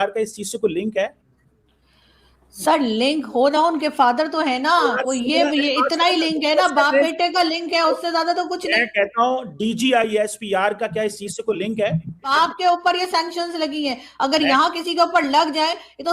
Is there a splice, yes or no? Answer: yes